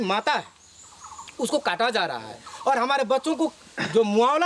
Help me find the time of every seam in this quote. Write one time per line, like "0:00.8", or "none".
none

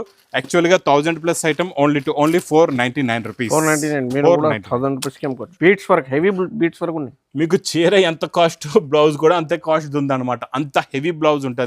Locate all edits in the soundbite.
0:05.5

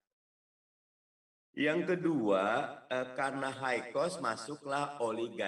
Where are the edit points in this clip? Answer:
none

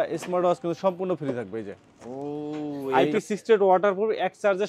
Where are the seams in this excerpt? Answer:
0:02.9

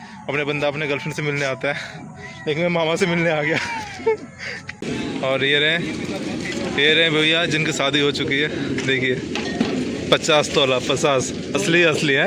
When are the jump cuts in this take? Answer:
0:04.8

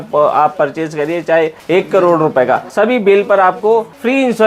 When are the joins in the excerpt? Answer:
none

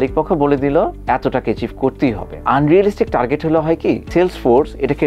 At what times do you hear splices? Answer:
0:01.0
0:02.3

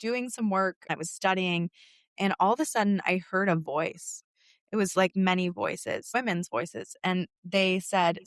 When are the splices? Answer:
0:00.9
0:04.1
0:06.1

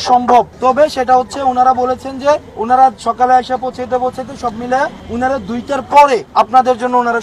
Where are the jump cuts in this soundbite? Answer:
0:01.0
0:02.5
0:05.0
0:06.3

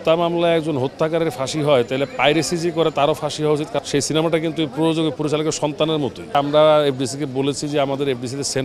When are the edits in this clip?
0:03.8
0:06.3

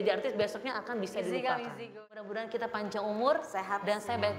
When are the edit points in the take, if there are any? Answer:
0:01.8

